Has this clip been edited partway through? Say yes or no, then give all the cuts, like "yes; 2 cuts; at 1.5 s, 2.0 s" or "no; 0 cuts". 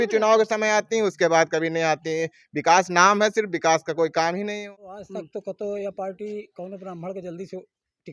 yes; 1 cut; at 4.6 s